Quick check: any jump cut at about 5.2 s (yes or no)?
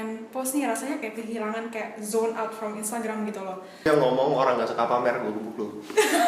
no